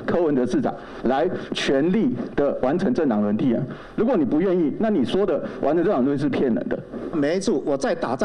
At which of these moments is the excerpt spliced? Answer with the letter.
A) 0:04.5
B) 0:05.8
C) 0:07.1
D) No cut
C